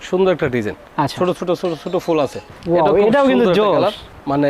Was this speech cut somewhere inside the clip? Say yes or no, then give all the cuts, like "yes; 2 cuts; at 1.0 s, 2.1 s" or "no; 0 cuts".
yes; 1 cut; at 2.5 s